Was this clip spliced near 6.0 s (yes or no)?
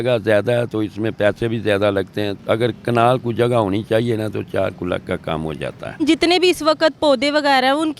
yes